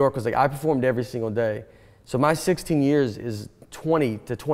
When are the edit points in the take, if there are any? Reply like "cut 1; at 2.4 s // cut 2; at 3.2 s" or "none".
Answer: none